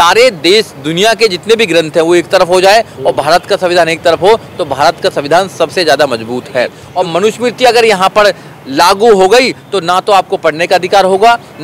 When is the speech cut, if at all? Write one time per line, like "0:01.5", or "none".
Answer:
0:06.8